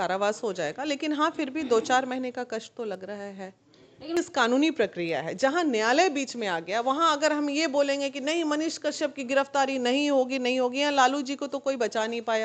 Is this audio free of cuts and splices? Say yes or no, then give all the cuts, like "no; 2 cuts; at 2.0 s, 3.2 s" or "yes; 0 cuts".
no; 1 cut; at 4.2 s